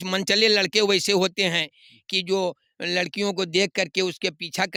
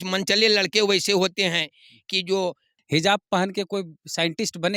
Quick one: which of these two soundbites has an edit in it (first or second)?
second